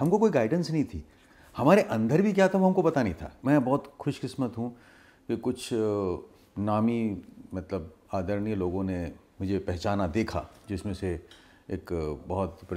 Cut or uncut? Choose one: cut